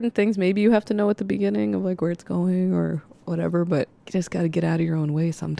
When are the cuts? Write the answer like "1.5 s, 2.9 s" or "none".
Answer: 4.0 s

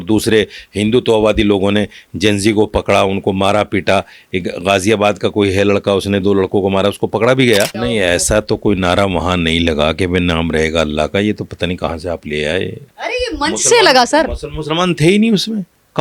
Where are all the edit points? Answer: 7.8 s

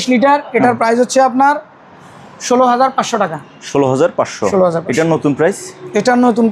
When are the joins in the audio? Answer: none

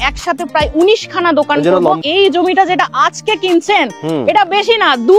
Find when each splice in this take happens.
2.0 s

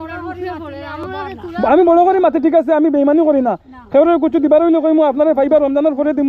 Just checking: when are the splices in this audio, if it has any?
none

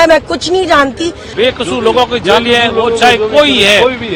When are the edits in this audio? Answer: 1.2 s

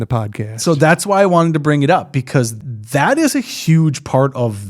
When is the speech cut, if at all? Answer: 2.5 s

